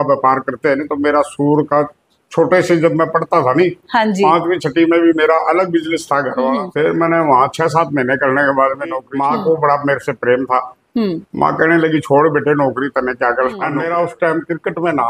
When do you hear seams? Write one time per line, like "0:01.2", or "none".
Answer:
0:06.6
0:09.1
0:13.8